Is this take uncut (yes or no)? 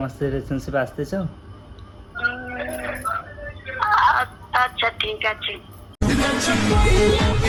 yes